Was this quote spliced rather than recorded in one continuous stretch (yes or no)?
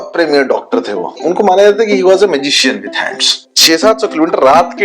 yes